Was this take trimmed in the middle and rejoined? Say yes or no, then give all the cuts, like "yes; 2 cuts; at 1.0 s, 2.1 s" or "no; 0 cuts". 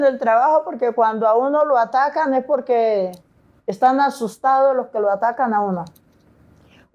no; 0 cuts